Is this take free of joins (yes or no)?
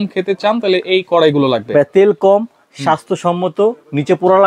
yes